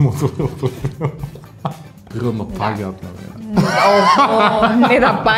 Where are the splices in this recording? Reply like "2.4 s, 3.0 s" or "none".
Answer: 2.0 s